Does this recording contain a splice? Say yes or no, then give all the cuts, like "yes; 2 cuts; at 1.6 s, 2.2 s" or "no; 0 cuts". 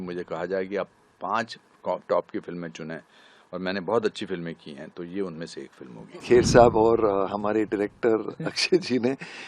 yes; 1 cut; at 6.2 s